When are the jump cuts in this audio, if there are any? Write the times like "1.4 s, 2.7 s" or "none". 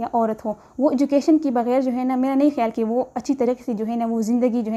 none